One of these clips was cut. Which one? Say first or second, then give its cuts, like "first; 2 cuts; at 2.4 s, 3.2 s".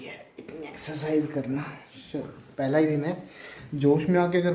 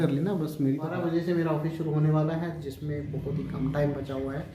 second; 1 cut; at 1.0 s